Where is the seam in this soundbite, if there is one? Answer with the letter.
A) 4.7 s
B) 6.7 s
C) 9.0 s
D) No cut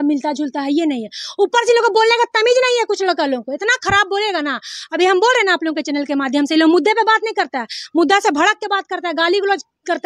D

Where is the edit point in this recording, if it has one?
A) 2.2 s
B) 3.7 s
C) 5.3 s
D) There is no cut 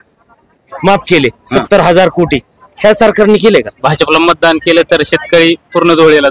B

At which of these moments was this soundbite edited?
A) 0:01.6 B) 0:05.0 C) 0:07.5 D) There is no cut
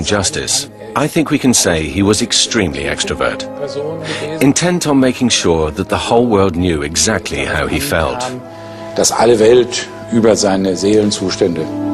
A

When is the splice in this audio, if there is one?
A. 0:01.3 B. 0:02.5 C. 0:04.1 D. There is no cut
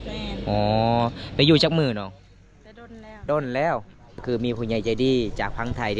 C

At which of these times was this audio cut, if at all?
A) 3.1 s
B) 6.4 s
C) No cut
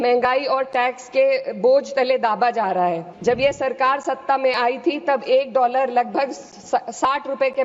A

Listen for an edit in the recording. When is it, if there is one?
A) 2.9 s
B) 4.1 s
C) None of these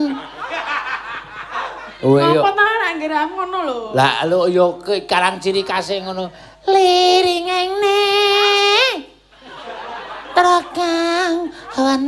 A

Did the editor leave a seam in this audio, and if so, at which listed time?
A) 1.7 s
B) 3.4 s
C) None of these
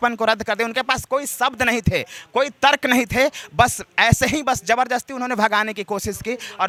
C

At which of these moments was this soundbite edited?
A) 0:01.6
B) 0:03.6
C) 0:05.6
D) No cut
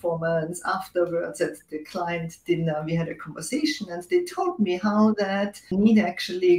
C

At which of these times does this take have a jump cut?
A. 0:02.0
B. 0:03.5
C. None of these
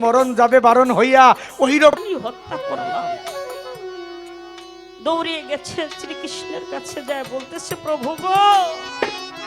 A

